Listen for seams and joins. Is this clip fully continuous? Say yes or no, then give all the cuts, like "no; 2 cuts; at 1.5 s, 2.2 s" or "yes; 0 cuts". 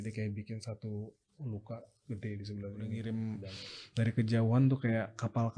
no; 1 cut; at 2.9 s